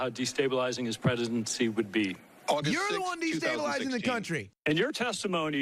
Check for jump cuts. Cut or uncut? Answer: cut